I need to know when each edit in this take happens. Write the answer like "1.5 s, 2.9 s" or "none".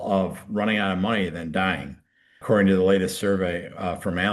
2.4 s